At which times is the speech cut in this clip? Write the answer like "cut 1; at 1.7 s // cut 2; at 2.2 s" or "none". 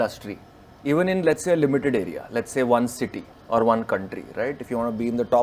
none